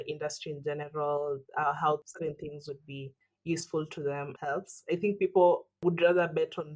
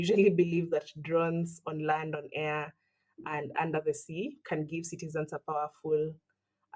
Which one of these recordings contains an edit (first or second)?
first